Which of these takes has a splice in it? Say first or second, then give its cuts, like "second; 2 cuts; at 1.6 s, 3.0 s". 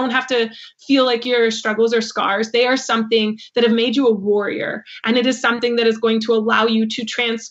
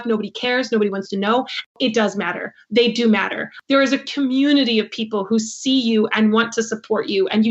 second; 2 cuts; at 1.7 s, 3.5 s